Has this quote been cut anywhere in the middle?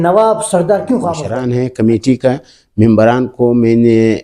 yes; 1 cut; at 1.3 s

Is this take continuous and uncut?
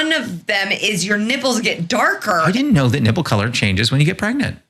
no; 1 cut; at 2.4 s

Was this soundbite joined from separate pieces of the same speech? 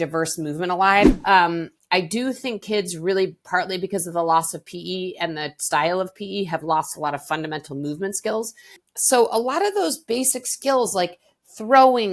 yes; 2 cuts; at 1.1 s, 8.8 s

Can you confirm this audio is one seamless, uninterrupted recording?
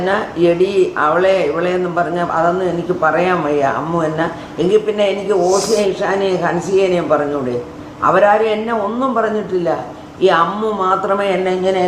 yes; 0 cuts

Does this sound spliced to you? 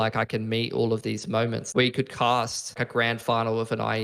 yes; 2 cuts; at 1.6 s, 2.8 s

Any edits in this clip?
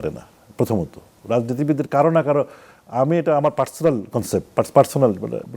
no; 0 cuts

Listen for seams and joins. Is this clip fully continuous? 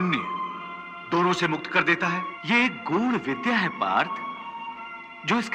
no; 1 cut; at 2.3 s

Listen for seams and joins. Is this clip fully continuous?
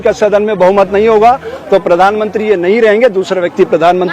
yes; 0 cuts

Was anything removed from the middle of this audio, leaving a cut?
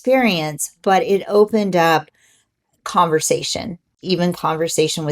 yes; 1 cut; at 3.9 s

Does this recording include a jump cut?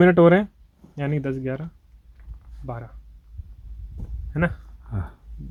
no; 0 cuts

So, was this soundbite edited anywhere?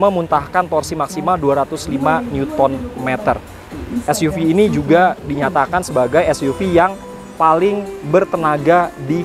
no; 0 cuts

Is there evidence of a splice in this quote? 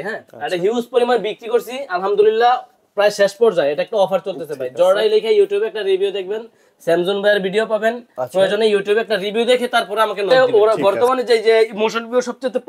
yes; 1 cut; at 10.3 s

